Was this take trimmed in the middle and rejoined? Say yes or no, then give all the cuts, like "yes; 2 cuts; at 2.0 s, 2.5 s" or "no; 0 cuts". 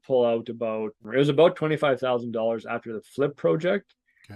yes; 1 cut; at 1.0 s